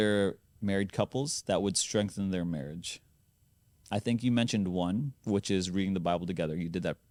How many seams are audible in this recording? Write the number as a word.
zero